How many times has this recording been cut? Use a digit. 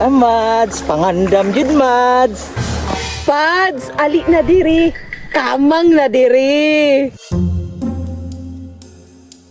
0